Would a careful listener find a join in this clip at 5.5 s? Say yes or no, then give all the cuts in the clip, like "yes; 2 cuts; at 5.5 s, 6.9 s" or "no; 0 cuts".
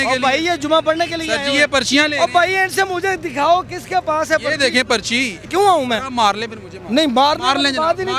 yes; 1 cut; at 5.5 s